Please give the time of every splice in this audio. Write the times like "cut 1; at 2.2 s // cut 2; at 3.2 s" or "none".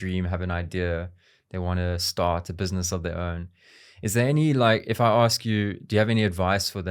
none

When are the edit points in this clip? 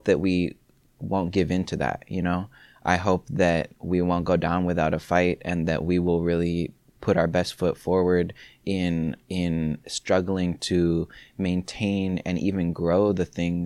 none

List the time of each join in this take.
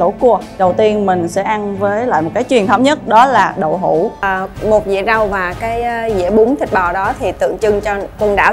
cut 1; at 4.2 s

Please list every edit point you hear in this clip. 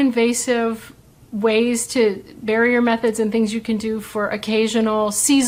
none

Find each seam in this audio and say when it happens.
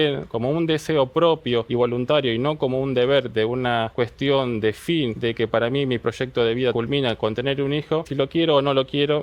cut 1; at 1.7 s // cut 2; at 3.9 s // cut 3; at 5.2 s // cut 4; at 6.7 s // cut 5; at 8.1 s

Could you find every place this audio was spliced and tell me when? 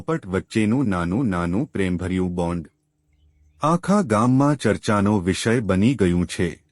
none

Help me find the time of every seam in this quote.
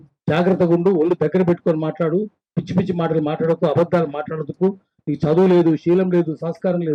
none

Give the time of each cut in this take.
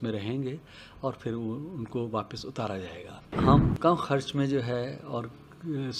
cut 1; at 3.4 s

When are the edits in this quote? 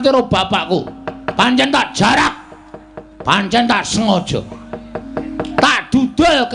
none

